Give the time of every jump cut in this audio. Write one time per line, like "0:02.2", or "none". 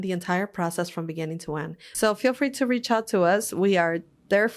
0:01.8